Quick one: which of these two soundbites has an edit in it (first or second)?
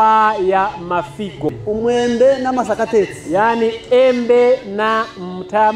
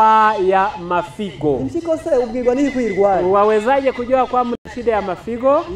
first